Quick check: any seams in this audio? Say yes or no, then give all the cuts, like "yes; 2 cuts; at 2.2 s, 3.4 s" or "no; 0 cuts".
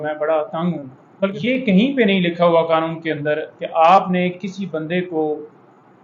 yes; 1 cut; at 1.3 s